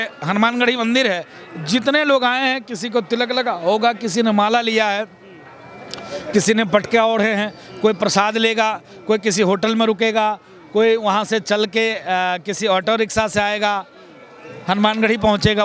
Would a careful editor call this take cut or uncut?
uncut